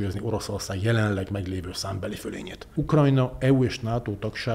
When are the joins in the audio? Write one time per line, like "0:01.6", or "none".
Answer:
0:02.7